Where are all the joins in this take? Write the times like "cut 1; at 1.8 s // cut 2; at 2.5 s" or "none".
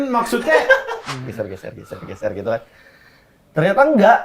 cut 1; at 1.0 s